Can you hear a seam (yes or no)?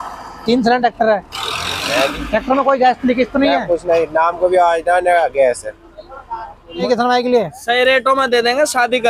yes